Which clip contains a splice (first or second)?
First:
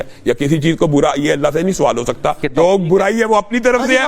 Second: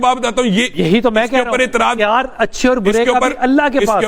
first